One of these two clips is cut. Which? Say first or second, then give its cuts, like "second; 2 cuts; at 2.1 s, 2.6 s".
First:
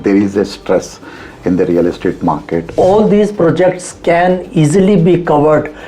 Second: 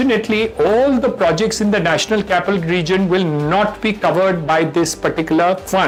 first; 1 cut; at 2.8 s